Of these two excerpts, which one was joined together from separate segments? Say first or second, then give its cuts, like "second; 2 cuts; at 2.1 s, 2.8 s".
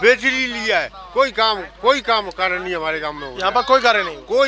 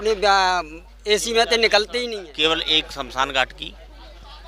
second; 1 cut; at 2.1 s